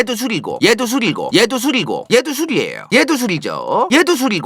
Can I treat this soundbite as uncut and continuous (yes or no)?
yes